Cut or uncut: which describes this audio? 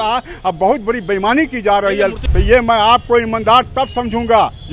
cut